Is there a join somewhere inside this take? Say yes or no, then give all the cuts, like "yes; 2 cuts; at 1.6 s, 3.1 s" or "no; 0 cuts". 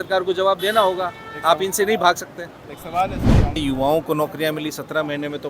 yes; 1 cut; at 3.6 s